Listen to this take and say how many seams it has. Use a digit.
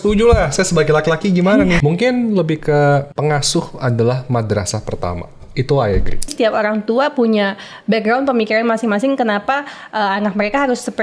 2